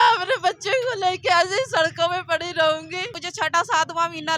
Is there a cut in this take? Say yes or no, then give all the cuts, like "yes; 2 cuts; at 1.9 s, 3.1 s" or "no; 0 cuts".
yes; 1 cut; at 3.2 s